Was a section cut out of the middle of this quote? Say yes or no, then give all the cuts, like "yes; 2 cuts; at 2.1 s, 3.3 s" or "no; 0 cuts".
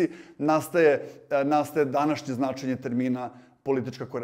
no; 0 cuts